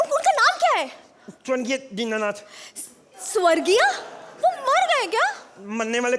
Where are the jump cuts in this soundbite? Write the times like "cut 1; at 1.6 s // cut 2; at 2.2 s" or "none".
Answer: none